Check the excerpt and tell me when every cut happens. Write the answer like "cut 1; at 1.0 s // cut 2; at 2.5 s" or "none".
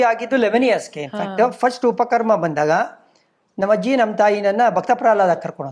none

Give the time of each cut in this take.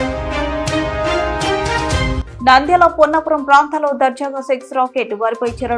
cut 1; at 2.2 s

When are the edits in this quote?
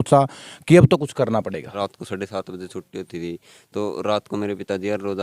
cut 1; at 1.7 s

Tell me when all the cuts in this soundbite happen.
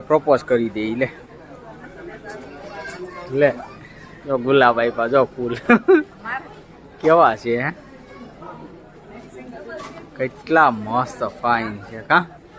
none

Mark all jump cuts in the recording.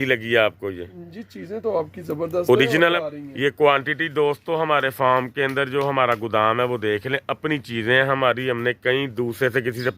cut 1; at 3.0 s

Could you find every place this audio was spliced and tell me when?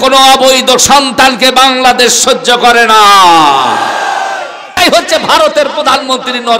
cut 1; at 4.8 s

